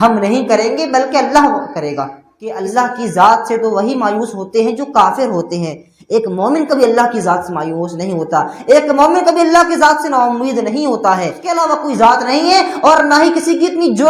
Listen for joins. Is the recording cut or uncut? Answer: cut